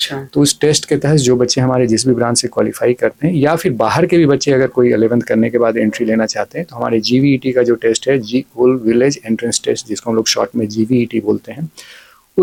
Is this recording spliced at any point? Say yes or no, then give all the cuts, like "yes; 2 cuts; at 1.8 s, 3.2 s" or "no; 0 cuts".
no; 0 cuts